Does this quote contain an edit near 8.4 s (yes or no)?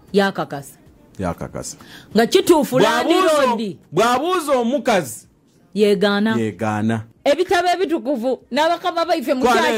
no